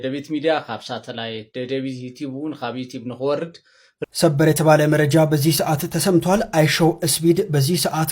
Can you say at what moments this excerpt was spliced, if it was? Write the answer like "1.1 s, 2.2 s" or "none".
4.0 s

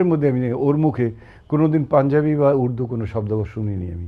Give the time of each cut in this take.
none

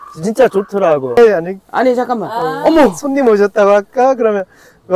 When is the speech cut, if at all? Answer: 1.2 s

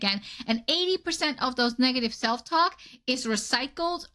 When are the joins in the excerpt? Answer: none

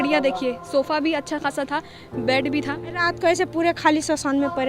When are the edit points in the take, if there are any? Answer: 2.8 s

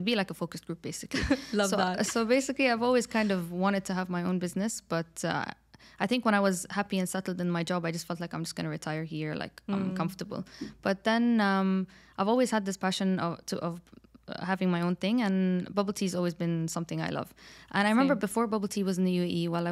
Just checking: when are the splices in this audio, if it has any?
none

